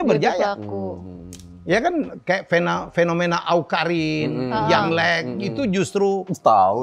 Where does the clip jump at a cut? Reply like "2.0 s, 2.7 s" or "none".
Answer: none